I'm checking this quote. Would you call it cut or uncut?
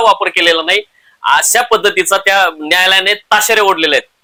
uncut